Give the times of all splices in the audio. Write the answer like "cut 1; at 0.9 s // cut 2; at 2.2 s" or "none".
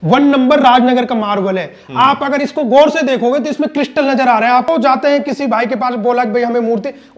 cut 1; at 4.7 s